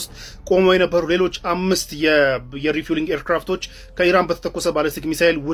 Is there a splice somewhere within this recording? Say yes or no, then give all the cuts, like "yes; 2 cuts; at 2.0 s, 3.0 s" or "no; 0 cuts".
no; 0 cuts